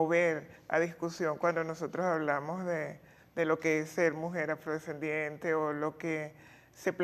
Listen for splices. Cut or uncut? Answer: uncut